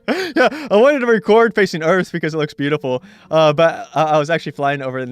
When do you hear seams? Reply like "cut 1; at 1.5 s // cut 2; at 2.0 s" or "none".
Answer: cut 1; at 3.4 s